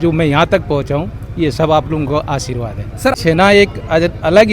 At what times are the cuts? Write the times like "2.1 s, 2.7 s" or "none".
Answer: 3.2 s